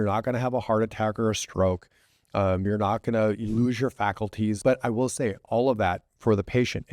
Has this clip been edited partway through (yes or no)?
yes